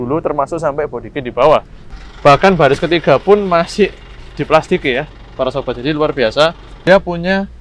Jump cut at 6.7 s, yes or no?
yes